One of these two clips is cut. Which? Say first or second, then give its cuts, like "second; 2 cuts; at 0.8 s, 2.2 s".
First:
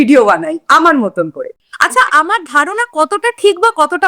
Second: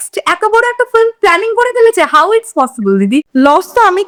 first; 1 cut; at 1.5 s